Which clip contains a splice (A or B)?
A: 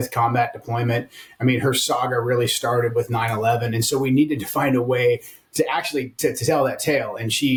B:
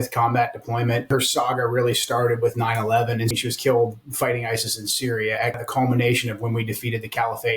B